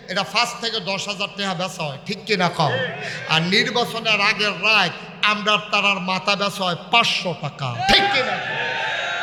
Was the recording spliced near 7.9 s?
no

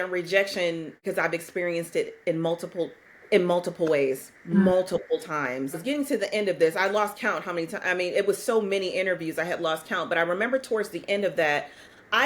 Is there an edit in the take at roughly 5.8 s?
yes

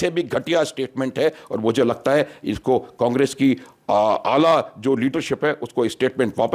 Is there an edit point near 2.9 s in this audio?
no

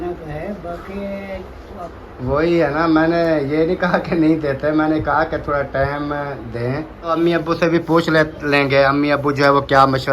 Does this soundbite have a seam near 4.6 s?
no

